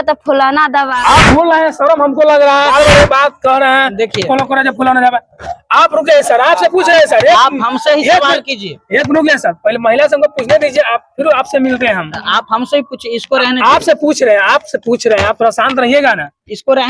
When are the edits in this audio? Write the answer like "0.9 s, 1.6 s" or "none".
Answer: 0.9 s, 2.7 s